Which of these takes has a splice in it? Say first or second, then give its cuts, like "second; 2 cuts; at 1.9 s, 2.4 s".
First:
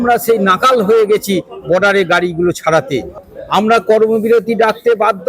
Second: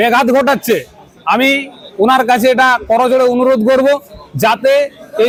first; 1 cut; at 3.2 s